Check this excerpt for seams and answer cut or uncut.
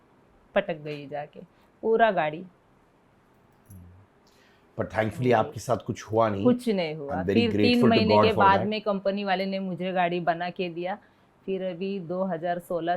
uncut